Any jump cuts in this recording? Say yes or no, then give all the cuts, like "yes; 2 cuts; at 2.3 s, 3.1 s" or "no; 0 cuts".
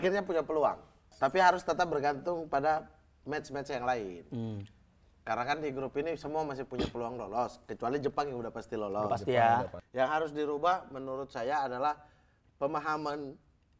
yes; 2 cuts; at 1.1 s, 9.8 s